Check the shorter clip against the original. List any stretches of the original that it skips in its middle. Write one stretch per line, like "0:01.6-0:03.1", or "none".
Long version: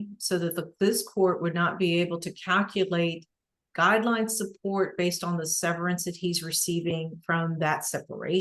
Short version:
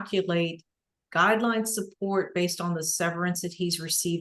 none